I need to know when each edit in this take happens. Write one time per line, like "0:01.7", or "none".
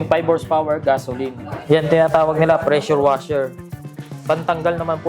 0:01.5

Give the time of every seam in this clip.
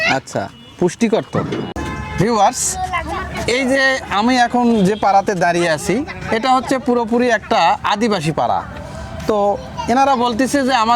0:01.8

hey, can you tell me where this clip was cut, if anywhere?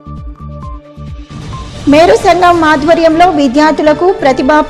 0:01.7

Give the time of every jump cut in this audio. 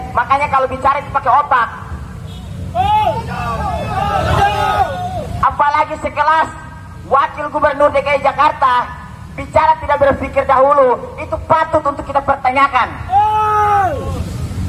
none

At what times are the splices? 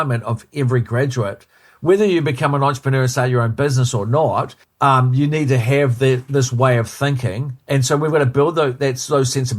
none

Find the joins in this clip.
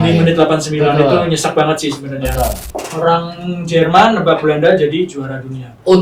0:02.7

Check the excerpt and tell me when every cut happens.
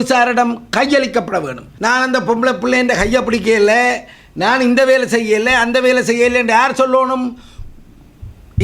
0:01.6

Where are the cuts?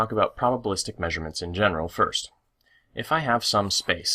none

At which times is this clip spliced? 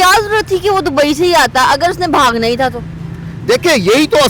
none

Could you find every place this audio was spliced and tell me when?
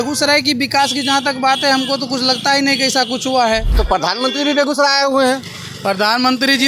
0:03.7

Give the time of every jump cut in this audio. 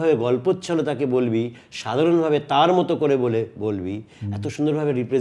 none

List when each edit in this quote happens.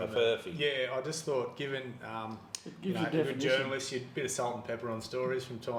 none

